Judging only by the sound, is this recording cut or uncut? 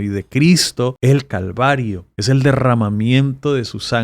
cut